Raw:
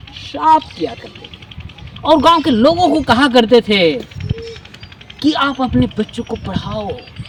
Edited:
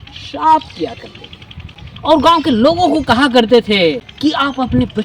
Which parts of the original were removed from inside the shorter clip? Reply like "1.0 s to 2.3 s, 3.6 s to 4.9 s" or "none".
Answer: 4.1 s to 5.1 s